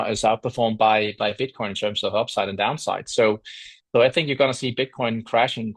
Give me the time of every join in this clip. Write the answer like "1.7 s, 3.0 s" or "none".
none